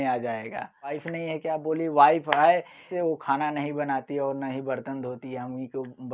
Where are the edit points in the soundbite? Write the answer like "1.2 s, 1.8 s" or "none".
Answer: 1.0 s, 2.9 s